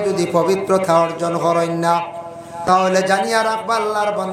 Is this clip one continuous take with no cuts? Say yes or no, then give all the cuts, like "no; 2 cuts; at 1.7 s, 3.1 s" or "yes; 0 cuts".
no; 1 cut; at 2.5 s